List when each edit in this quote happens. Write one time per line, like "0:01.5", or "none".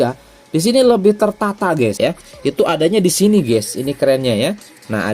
0:01.9